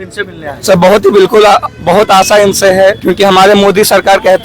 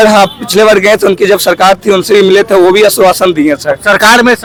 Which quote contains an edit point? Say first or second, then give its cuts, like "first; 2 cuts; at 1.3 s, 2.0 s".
first; 1 cut; at 3.0 s